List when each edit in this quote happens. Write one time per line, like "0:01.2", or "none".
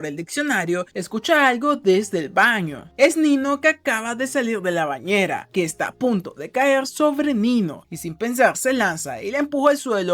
0:05.5